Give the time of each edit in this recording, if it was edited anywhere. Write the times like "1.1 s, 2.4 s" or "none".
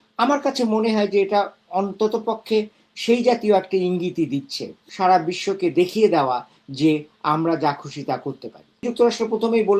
4.8 s, 8.8 s